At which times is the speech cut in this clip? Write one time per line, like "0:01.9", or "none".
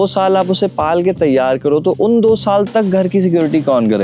none